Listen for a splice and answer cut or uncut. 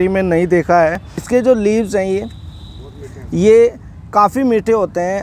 cut